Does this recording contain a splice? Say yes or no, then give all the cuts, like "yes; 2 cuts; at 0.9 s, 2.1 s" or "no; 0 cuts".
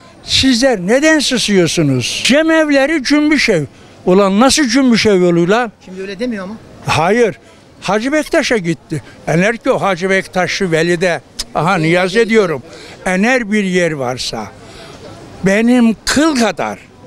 yes; 1 cut; at 2.1 s